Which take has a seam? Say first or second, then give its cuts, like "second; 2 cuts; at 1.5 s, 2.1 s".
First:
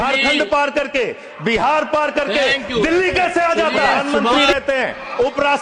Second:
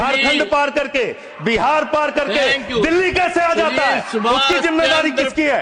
first; 1 cut; at 4.4 s